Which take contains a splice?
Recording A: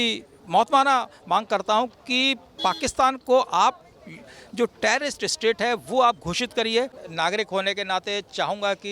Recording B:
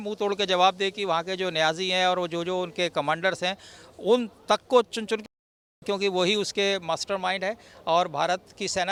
A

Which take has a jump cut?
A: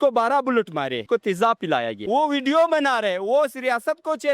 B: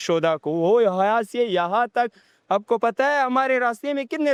A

